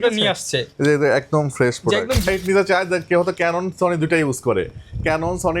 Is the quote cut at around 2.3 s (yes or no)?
yes